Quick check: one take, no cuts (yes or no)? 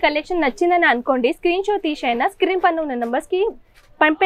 yes